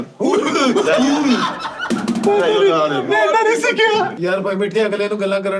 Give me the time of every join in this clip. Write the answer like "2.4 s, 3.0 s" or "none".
4.2 s